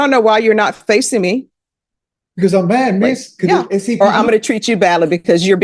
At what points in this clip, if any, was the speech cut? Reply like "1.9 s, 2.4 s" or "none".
4.0 s